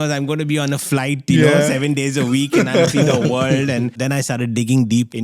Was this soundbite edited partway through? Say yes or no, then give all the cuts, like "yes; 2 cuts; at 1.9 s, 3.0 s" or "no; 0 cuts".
yes; 1 cut; at 4.0 s